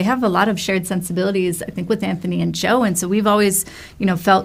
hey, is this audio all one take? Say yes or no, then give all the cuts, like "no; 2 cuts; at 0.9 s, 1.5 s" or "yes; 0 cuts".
yes; 0 cuts